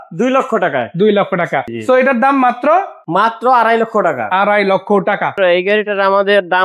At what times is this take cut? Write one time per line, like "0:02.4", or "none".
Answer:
0:01.7
0:03.0
0:05.3